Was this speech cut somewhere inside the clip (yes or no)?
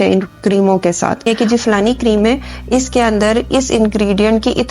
yes